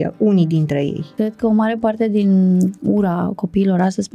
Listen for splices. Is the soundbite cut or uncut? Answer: cut